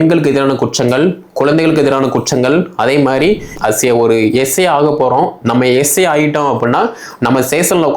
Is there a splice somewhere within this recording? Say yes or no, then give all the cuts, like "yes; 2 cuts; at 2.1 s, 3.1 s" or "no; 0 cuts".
yes; 1 cut; at 3.5 s